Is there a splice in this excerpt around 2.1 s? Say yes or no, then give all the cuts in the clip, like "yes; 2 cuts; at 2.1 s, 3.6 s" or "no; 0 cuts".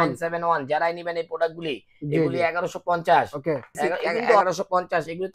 no; 1 cut; at 4.4 s